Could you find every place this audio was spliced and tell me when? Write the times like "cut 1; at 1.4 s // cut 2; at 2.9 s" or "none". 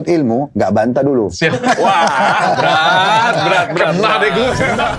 none